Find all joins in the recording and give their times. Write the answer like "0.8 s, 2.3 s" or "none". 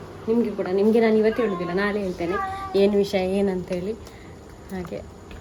none